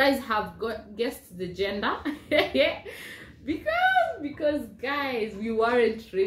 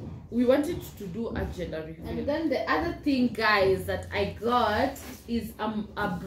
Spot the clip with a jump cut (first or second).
second